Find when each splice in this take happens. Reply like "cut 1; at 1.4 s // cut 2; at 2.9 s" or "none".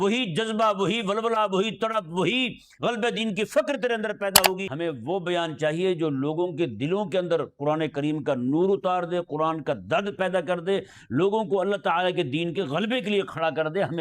cut 1; at 4.6 s